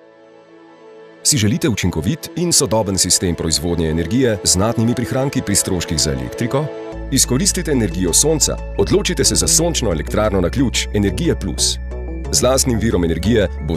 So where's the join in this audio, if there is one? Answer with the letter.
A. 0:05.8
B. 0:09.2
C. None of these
C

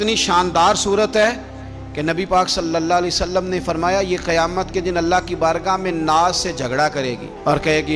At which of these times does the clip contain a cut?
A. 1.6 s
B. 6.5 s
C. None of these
C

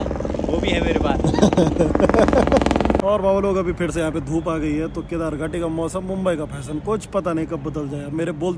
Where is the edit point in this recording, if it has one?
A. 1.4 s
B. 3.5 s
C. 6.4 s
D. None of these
D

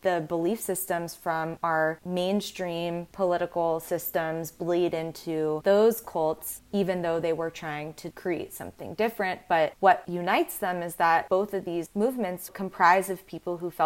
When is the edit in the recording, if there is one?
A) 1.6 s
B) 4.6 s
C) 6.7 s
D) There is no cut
D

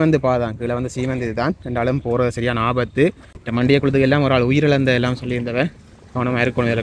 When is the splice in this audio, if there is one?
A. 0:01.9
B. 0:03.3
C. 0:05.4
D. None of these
B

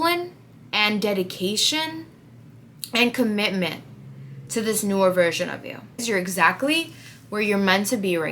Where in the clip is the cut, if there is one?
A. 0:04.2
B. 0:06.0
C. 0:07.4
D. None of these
B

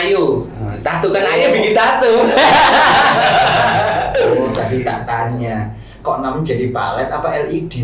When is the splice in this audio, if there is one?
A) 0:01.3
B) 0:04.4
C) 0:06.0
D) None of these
B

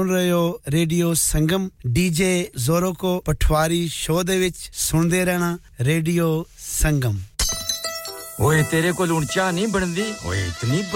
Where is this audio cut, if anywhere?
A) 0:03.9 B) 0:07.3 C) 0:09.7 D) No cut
B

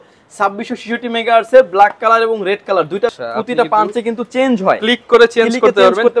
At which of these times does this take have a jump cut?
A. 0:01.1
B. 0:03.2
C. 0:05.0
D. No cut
B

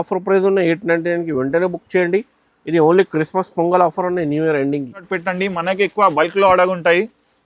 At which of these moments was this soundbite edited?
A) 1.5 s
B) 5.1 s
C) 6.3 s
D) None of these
B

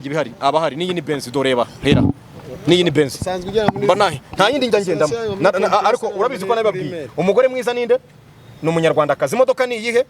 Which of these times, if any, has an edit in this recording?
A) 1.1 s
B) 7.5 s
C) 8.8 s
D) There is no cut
D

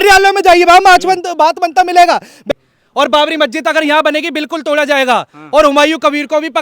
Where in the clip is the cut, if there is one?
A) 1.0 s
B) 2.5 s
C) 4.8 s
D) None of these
B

